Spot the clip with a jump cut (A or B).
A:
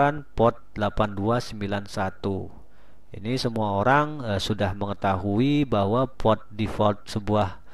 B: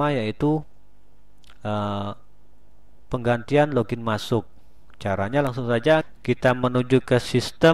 B